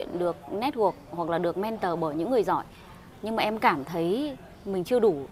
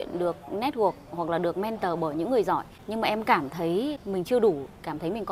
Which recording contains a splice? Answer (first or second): second